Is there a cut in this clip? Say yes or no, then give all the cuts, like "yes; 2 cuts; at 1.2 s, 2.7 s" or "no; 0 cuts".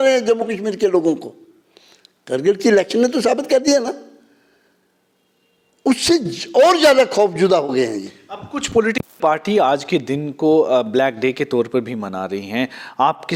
no; 0 cuts